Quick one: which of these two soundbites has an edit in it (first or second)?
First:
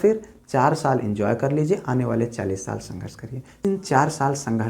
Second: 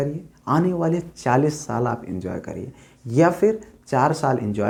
first